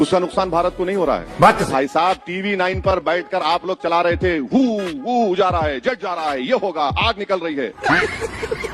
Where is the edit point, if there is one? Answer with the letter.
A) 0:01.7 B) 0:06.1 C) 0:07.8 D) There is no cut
A